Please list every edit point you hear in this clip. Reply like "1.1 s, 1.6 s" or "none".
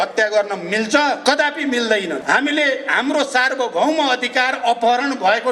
1.2 s, 2.2 s